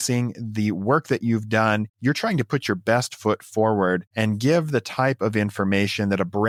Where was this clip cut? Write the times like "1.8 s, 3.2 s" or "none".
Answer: none